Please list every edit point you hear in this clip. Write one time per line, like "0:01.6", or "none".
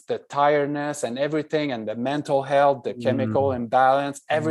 none